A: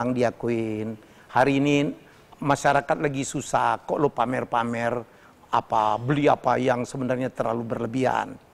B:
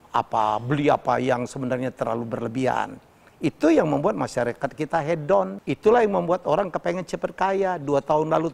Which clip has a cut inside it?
B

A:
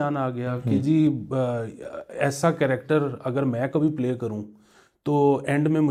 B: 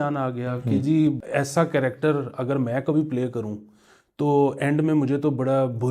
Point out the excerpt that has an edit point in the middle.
B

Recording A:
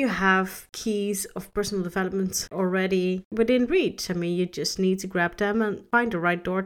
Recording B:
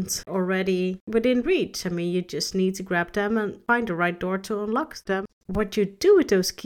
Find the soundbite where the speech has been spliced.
B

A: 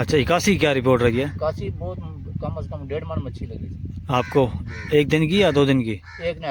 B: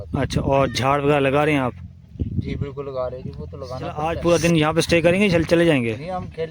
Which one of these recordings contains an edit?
B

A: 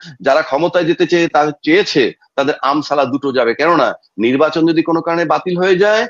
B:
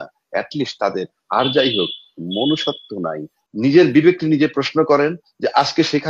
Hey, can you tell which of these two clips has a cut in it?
B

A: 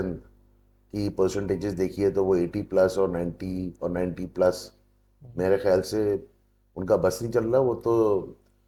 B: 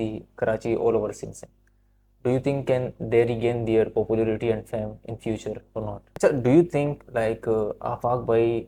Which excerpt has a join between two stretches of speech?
B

